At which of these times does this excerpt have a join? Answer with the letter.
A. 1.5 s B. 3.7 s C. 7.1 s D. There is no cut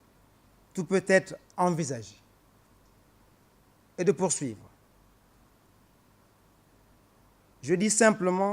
C